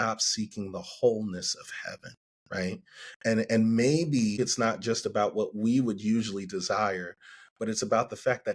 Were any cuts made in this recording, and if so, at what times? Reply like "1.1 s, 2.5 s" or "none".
4.4 s

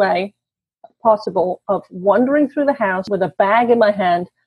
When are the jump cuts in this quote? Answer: 3.1 s

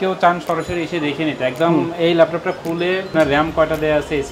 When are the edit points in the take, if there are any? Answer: 3.1 s

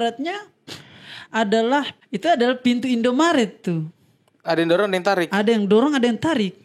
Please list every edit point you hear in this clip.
2.0 s

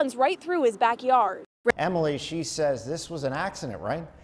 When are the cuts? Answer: 1.7 s

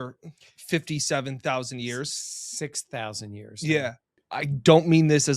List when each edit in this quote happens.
4.1 s

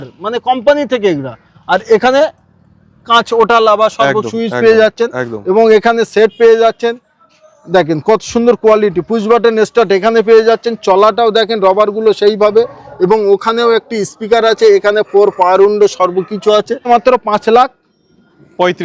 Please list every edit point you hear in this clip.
16.8 s

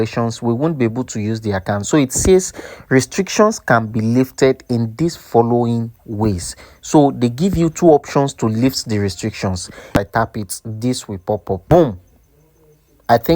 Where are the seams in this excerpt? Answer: 10.0 s, 11.6 s

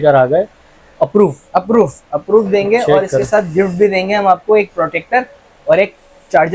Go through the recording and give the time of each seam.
none

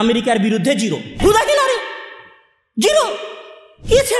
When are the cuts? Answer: 1.1 s

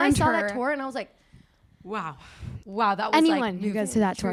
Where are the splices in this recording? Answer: none

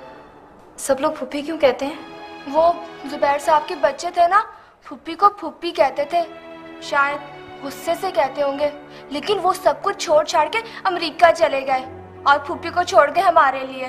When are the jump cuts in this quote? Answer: 2.9 s

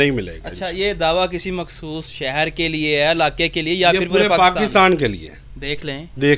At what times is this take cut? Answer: none

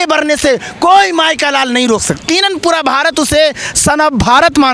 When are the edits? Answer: 2.2 s

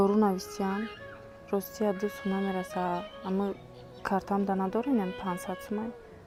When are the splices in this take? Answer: none

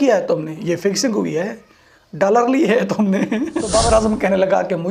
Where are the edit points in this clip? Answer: 3.8 s

